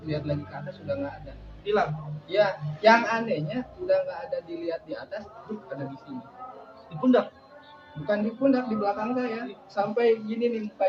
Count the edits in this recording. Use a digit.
0